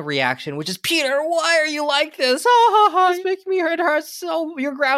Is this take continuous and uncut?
yes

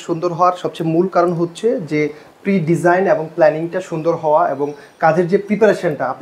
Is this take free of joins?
yes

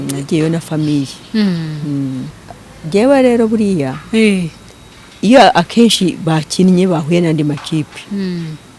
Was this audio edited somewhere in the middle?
yes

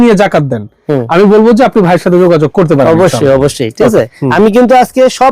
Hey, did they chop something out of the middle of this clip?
yes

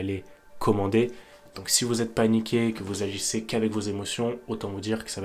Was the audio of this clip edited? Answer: no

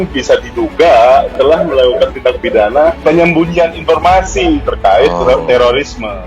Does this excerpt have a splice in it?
yes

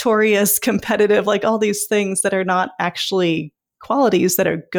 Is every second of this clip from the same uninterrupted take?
yes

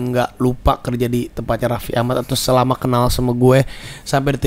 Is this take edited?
no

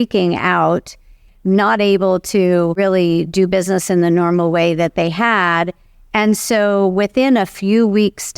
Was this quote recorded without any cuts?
no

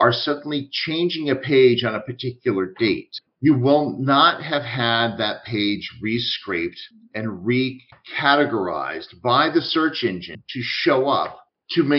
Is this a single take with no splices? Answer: no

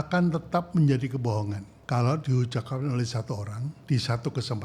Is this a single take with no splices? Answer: no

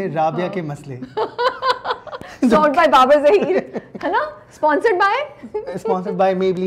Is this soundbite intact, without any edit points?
yes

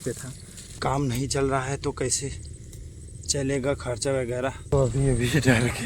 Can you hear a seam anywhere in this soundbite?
yes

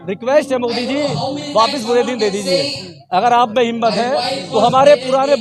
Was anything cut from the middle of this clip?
no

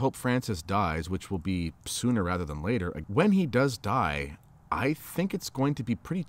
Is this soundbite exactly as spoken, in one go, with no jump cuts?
no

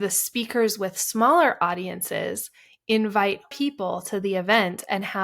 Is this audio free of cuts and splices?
no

